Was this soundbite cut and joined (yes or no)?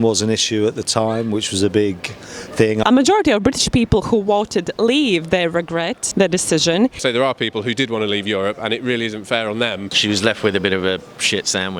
yes